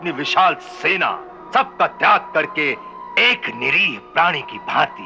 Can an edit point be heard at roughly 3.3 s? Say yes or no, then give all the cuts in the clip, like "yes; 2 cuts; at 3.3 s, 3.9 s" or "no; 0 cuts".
no; 1 cut; at 1.3 s